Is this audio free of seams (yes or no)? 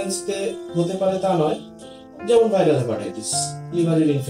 yes